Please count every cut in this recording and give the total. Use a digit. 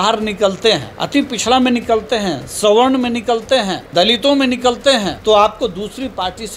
3